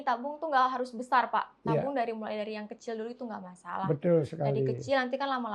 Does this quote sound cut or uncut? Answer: uncut